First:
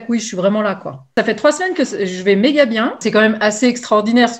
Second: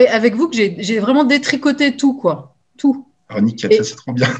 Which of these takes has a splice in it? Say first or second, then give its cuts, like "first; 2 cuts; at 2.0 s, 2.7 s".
first; 2 cuts; at 1.1 s, 3.0 s